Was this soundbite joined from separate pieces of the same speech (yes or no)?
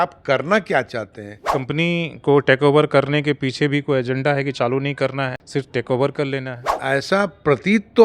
yes